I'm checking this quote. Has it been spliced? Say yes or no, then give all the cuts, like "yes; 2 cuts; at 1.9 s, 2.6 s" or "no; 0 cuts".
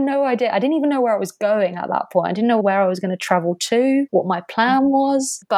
yes; 1 cut; at 2.6 s